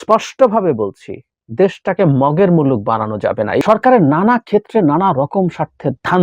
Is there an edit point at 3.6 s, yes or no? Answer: yes